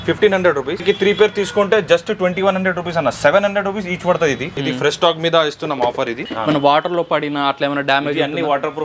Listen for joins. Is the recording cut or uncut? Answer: cut